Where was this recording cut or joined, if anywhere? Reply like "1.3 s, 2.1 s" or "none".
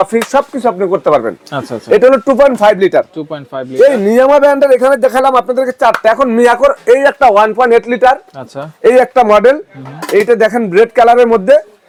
none